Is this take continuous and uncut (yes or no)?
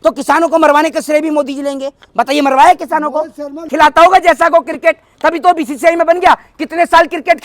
no